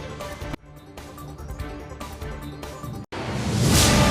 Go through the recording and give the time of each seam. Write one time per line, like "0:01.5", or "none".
0:03.0